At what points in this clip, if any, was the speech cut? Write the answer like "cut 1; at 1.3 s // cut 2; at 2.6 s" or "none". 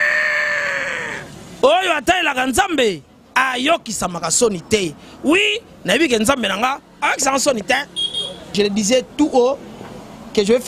cut 1; at 8.5 s